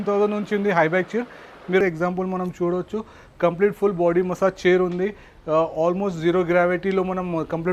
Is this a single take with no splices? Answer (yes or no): no